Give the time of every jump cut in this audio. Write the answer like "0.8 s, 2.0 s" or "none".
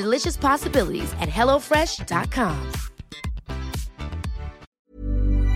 4.7 s